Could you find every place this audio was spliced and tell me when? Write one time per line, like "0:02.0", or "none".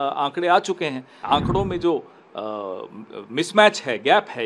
0:01.2